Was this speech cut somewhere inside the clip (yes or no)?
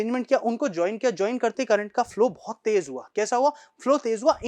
no